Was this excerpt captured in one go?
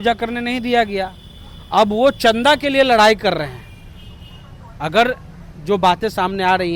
yes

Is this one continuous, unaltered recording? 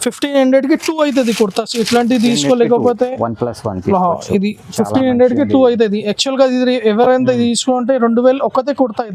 yes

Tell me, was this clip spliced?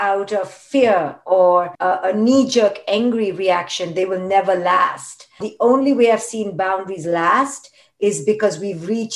yes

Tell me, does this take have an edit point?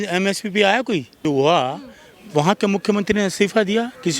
yes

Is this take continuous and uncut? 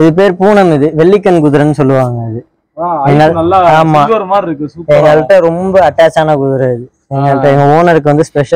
yes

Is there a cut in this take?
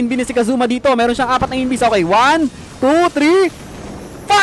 no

